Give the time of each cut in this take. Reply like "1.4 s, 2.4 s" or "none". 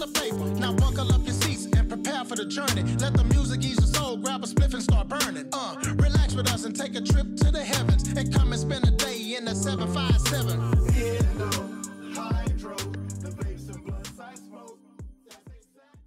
none